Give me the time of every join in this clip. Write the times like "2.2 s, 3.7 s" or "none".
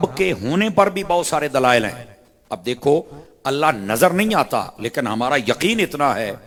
none